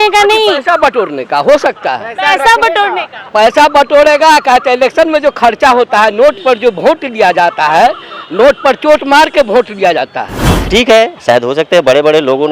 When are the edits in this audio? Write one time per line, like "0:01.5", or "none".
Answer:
0:10.7